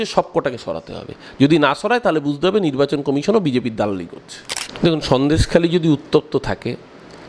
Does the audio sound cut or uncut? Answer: cut